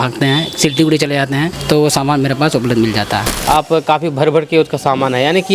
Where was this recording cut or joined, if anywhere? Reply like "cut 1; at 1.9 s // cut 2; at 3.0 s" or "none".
cut 1; at 1.5 s // cut 2; at 3.3 s